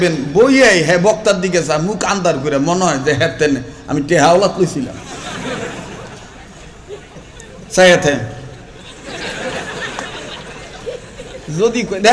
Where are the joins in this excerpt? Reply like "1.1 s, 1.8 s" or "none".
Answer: none